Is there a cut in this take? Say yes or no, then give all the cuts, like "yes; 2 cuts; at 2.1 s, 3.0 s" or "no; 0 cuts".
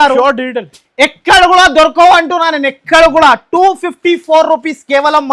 no; 0 cuts